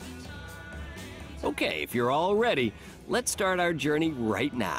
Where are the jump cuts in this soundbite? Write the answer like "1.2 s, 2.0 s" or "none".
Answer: 1.4 s